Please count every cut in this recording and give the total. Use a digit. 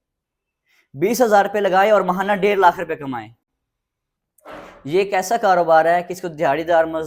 0